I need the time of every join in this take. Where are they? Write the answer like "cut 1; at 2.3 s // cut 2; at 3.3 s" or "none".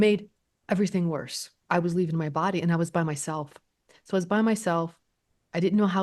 cut 1; at 1.6 s